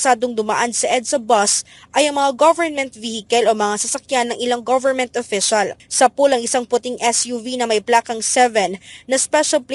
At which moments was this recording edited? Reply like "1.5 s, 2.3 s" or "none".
none